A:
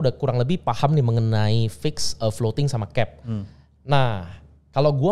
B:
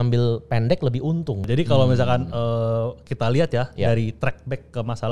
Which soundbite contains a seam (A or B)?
B